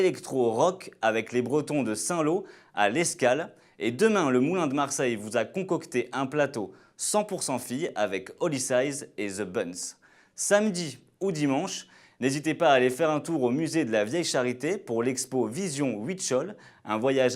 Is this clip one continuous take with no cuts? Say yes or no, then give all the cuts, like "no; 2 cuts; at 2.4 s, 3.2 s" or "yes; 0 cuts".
no; 1 cut; at 5.0 s